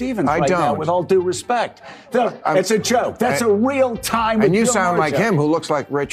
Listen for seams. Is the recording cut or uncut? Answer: uncut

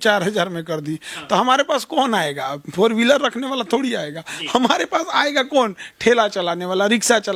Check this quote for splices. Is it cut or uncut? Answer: uncut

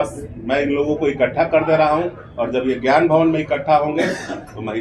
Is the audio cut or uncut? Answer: uncut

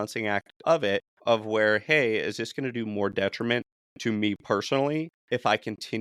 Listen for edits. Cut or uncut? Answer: uncut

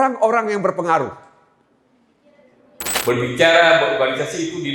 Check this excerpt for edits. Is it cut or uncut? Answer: cut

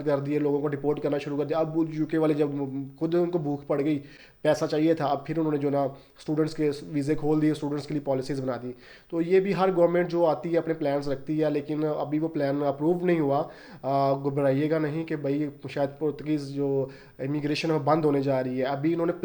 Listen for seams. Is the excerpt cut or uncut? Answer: uncut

